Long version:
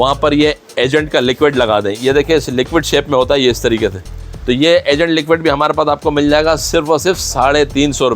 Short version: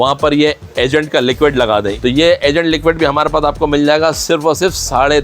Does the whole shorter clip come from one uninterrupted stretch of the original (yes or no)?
no